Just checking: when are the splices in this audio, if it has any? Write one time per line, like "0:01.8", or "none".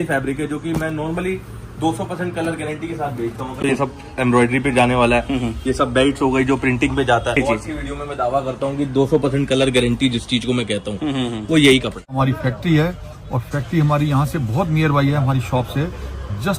0:03.6
0:07.4
0:12.0